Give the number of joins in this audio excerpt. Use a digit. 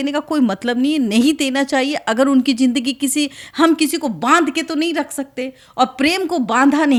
0